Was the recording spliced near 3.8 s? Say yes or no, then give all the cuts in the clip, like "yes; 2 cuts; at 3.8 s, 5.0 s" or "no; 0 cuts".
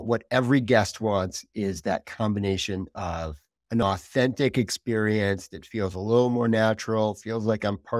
yes; 1 cut; at 3.8 s